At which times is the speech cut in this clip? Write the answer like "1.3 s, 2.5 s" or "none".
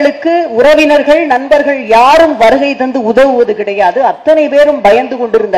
none